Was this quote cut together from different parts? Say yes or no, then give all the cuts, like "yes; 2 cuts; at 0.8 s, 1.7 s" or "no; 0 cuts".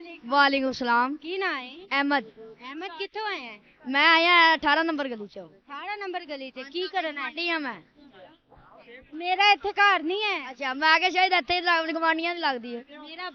no; 0 cuts